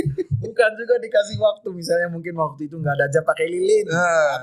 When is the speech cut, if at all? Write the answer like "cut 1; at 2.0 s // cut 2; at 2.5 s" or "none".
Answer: none